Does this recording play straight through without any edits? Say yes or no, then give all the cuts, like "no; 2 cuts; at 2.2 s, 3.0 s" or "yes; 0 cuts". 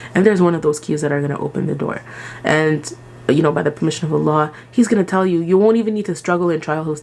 yes; 0 cuts